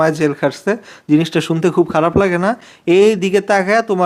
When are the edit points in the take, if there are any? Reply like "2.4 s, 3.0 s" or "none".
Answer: none